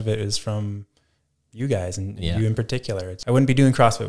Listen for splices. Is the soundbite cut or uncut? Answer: cut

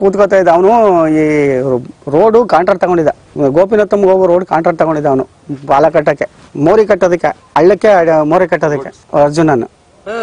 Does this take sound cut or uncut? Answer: uncut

